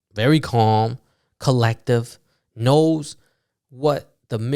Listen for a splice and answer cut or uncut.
uncut